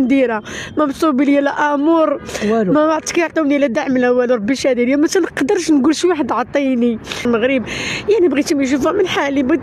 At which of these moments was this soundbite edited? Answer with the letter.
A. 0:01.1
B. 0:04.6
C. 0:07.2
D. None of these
C